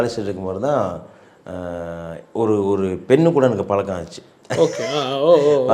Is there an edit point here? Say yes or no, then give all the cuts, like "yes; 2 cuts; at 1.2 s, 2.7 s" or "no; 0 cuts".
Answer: no; 0 cuts